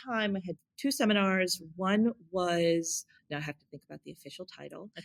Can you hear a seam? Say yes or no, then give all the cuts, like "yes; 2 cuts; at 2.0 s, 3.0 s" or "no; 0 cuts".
no; 0 cuts